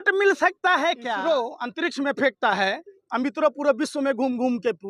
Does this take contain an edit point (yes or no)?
yes